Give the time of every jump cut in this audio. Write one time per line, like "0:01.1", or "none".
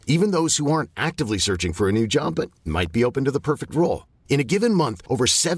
none